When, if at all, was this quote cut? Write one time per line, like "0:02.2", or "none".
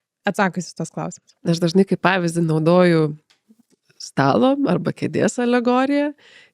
none